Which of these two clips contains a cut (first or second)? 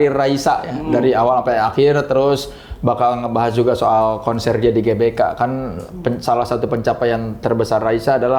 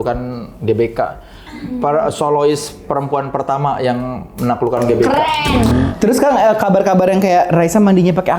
second